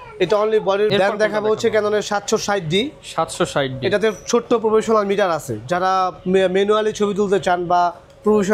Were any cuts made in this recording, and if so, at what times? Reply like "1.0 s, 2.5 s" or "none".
0.9 s